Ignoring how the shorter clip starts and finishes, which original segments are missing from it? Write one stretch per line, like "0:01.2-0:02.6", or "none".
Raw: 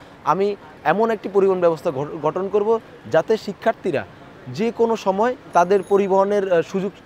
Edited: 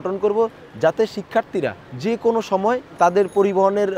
0:04.2-0:04.4